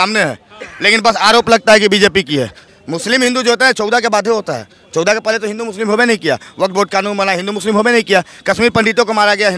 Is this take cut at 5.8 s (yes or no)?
no